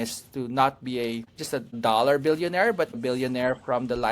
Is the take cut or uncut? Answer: cut